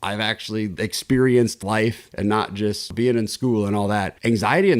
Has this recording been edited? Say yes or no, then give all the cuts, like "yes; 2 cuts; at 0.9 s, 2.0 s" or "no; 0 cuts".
yes; 1 cut; at 2.9 s